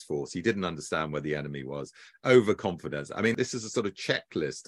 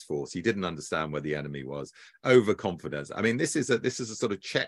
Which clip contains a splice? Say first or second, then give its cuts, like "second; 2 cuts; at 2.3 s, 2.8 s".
first; 1 cut; at 3.4 s